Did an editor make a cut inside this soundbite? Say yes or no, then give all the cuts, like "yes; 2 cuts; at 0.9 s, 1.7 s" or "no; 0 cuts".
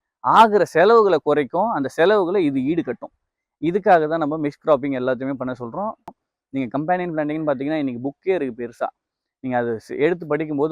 yes; 1 cut; at 6.1 s